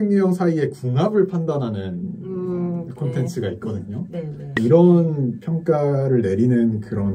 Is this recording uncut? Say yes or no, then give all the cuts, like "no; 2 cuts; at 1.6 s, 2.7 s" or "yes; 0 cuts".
no; 1 cut; at 4.4 s